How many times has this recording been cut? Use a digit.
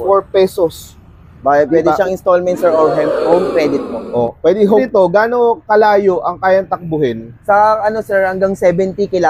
1